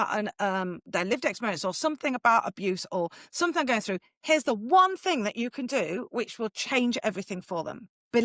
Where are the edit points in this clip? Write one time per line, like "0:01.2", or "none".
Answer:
none

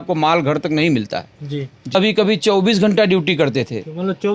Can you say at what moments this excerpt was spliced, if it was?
0:01.9

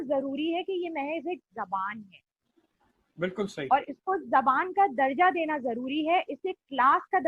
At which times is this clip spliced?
none

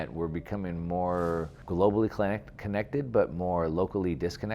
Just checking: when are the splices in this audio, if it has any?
0:01.6

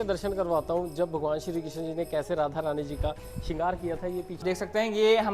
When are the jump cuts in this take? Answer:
0:04.4

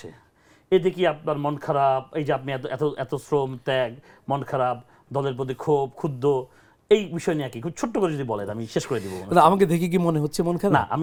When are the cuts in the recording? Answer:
none

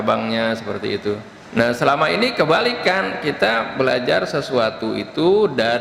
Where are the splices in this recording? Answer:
0:01.3

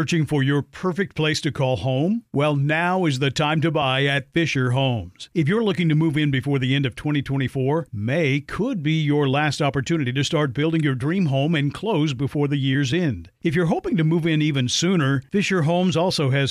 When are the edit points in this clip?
none

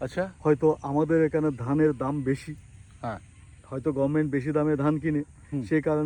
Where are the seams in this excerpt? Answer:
none

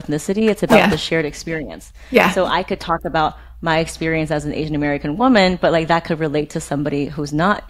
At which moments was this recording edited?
none

